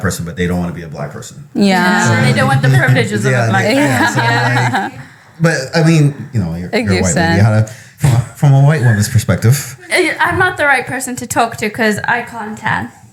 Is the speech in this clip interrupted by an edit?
no; 0 cuts

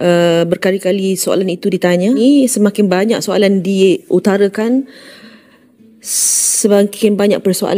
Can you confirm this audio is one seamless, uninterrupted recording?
no; 1 cut; at 2.2 s

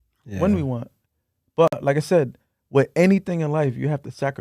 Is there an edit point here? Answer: no; 0 cuts

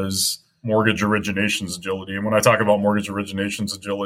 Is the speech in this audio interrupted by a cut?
no; 0 cuts

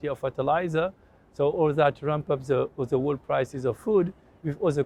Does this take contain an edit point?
no; 0 cuts

